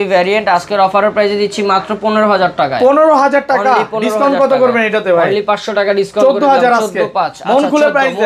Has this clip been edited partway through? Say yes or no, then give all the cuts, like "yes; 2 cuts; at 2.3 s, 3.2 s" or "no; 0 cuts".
no; 0 cuts